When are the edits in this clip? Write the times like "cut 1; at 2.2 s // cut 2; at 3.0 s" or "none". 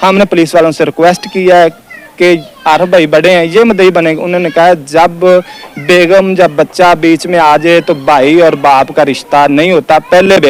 none